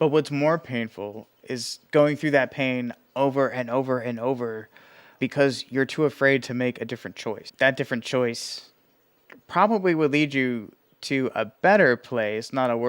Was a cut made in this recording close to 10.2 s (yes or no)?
no